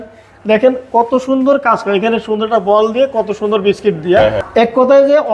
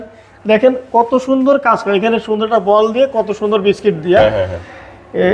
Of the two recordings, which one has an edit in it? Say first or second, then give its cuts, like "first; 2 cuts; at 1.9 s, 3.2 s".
first; 1 cut; at 4.4 s